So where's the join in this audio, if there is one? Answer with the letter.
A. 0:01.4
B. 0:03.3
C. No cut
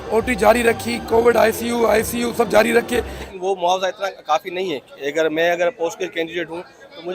B